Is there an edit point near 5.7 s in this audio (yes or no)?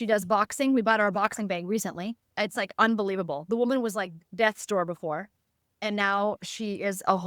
no